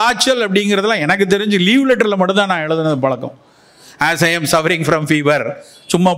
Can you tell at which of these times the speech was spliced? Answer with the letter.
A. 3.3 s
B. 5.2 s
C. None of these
C